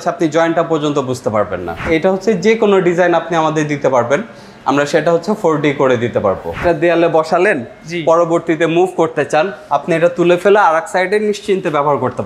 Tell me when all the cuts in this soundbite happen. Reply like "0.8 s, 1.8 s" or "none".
1.9 s, 6.6 s